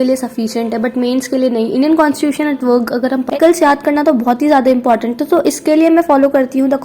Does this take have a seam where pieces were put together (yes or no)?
yes